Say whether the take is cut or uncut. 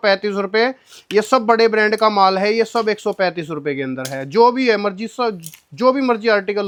uncut